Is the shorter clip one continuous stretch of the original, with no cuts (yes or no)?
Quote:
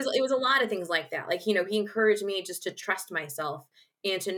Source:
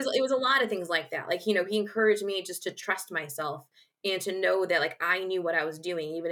yes